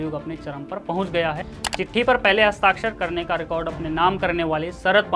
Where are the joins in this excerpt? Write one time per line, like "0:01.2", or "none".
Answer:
0:01.5